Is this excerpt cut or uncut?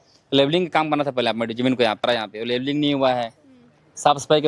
cut